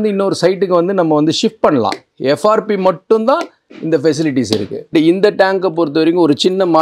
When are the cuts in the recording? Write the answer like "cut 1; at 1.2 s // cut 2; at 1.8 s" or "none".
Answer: cut 1; at 2.1 s // cut 2; at 4.9 s